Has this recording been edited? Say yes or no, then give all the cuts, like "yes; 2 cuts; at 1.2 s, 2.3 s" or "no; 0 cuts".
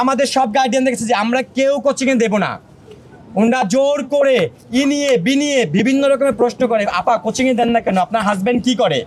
no; 0 cuts